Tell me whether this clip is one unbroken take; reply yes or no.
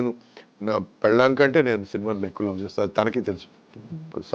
yes